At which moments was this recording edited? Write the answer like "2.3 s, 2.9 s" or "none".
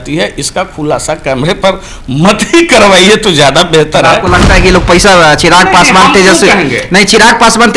none